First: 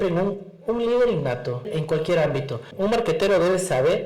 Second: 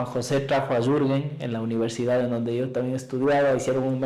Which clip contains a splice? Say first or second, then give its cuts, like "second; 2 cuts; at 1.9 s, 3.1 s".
first; 2 cuts; at 1.7 s, 2.7 s